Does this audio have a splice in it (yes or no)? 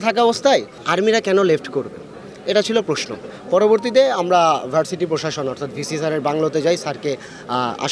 no